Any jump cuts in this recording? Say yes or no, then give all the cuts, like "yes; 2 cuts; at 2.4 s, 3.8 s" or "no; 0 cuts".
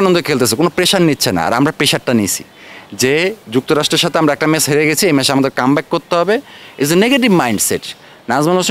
no; 0 cuts